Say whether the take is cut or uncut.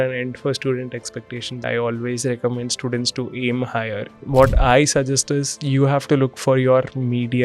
cut